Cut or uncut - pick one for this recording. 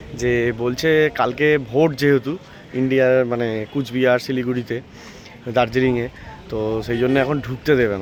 uncut